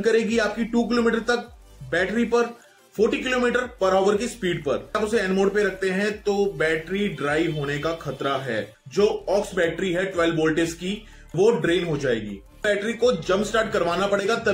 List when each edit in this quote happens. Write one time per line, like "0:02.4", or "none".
0:05.0
0:08.8
0:12.6